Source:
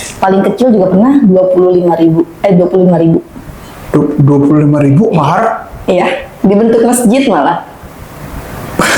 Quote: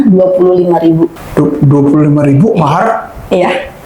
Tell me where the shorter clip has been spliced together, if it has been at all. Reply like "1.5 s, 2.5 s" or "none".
1.2 s